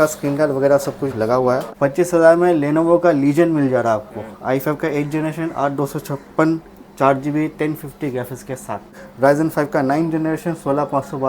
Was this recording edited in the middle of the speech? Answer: yes; 2 cuts; at 1.7 s, 9.0 s

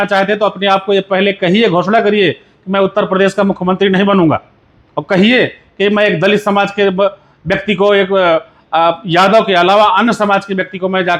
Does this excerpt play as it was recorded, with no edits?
yes; 0 cuts

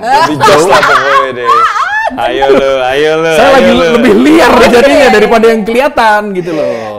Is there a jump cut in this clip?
no; 0 cuts

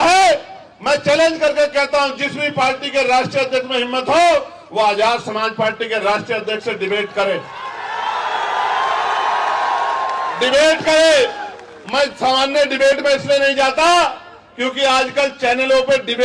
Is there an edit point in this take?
no; 0 cuts

